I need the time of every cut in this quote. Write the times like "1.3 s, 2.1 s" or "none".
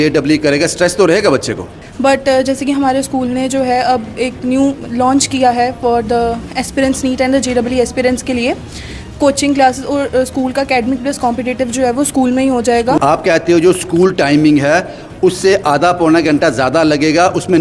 1.9 s, 13.0 s